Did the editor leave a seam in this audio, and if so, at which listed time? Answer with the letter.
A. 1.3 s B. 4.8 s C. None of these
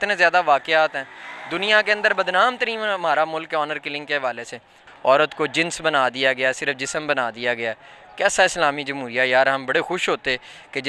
B